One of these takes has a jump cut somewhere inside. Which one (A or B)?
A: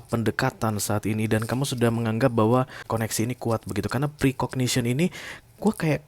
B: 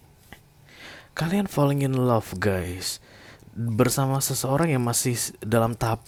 A